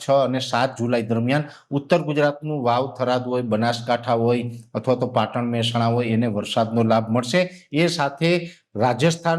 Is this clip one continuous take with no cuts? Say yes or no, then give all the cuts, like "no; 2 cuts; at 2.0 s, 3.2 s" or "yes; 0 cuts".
yes; 0 cuts